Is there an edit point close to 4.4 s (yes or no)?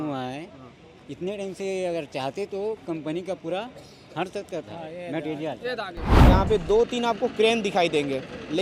no